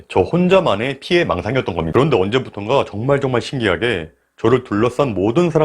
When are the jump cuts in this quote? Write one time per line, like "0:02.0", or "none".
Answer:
0:01.9